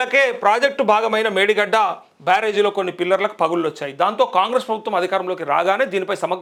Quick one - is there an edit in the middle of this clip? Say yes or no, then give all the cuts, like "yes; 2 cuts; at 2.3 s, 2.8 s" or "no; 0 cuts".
no; 0 cuts